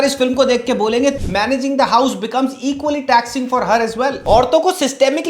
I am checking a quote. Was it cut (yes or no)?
yes